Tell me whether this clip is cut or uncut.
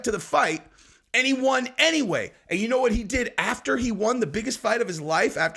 uncut